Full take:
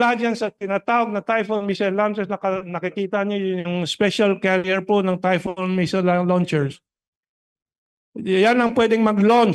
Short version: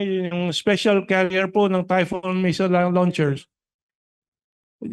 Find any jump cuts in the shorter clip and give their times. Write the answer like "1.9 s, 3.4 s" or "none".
none